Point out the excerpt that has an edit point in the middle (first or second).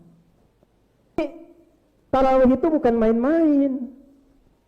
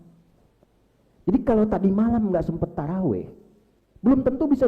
first